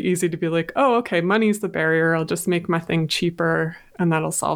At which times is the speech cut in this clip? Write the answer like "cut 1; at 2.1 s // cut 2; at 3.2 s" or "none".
none